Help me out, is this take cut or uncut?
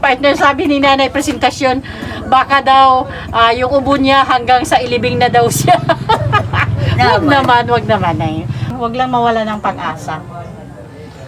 cut